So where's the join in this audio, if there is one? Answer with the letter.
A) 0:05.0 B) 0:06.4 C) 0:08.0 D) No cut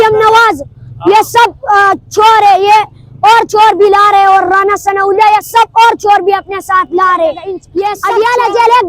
C